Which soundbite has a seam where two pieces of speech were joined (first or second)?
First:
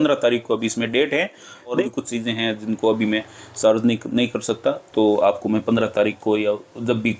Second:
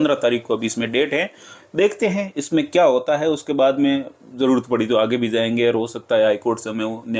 first